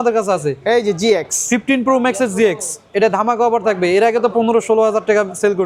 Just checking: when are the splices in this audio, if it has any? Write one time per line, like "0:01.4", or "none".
none